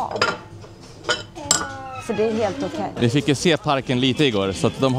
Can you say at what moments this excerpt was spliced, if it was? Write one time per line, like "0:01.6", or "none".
0:03.0